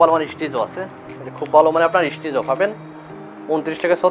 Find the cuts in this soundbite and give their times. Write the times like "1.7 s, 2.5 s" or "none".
none